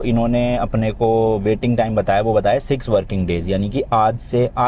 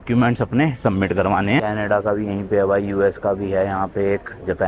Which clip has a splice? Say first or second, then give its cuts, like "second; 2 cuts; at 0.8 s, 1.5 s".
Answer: second; 1 cut; at 1.6 s